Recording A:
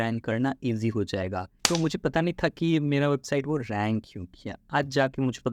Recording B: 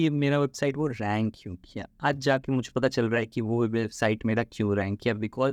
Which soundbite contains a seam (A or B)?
A